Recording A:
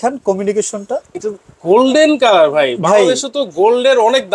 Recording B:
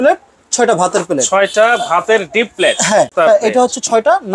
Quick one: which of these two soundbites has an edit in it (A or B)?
B